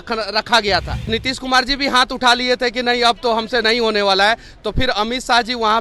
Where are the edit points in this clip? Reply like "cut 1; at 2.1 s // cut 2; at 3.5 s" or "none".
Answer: cut 1; at 1.1 s